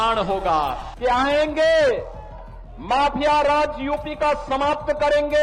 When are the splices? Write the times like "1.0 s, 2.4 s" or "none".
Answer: 1.0 s